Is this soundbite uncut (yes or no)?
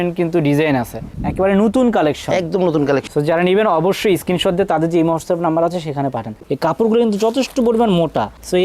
no